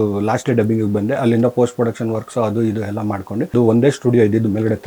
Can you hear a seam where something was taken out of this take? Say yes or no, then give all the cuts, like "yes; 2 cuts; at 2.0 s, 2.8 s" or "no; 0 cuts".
yes; 1 cut; at 3.5 s